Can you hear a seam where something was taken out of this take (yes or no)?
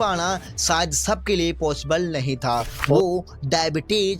yes